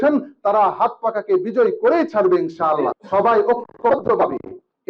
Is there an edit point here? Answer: yes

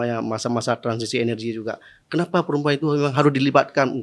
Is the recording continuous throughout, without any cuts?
yes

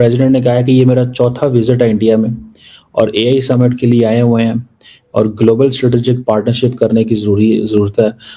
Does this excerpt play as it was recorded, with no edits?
yes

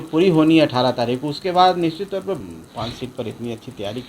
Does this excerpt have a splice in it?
yes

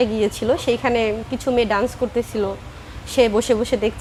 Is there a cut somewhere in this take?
no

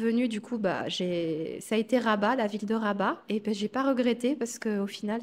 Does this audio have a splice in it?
no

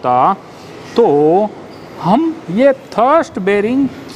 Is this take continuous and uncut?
yes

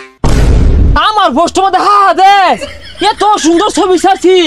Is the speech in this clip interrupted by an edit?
yes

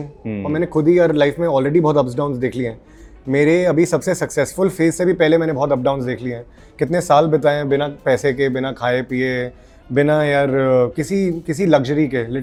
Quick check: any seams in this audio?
no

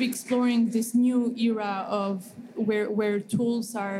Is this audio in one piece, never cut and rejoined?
yes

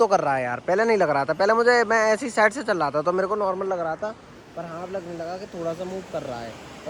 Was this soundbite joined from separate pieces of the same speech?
no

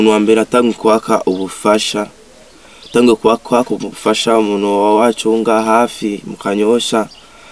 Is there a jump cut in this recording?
no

